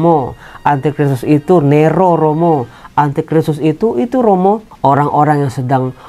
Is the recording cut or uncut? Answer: cut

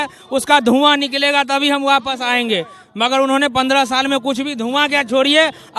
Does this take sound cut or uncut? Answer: uncut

